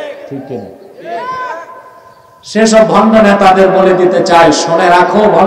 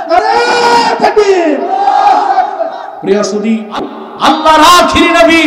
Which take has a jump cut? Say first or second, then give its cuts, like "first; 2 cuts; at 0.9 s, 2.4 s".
second; 1 cut; at 4.0 s